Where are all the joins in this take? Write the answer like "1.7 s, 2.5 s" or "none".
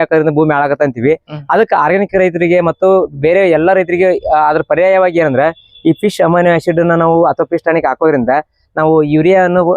none